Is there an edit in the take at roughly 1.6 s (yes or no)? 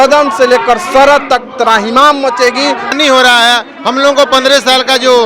no